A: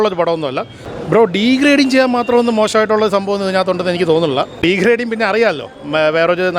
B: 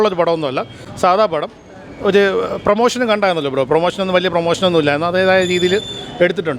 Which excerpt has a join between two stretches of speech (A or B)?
A